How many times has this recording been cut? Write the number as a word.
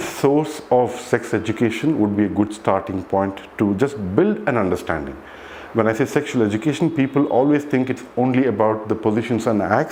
zero